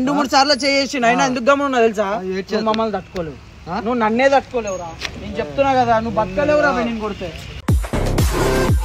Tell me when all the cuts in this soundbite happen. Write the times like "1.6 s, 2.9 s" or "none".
none